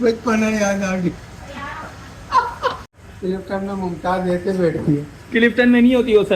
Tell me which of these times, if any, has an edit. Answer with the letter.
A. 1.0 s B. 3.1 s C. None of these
C